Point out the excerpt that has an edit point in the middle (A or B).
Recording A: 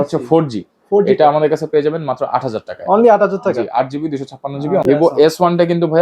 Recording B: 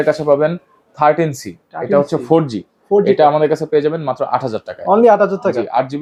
A